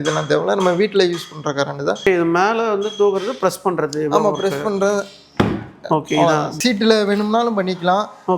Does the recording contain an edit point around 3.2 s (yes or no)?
no